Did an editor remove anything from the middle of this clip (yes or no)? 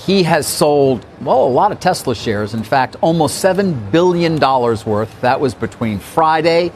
yes